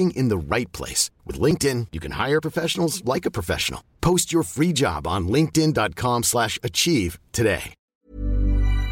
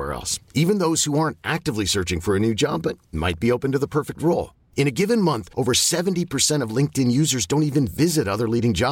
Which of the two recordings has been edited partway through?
first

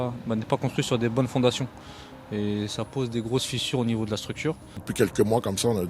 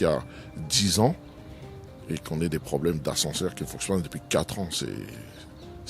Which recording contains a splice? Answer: first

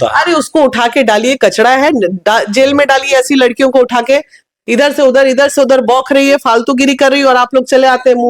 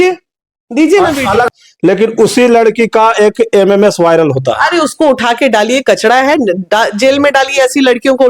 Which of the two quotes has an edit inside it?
second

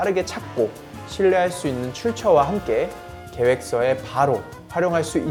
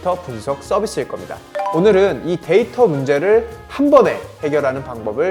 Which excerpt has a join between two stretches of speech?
second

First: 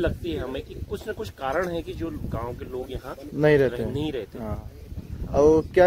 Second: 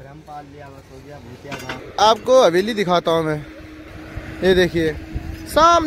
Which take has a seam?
second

